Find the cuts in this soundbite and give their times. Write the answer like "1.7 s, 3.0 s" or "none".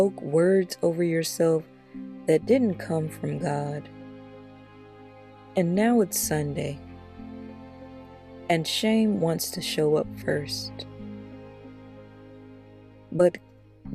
6.8 s, 8.5 s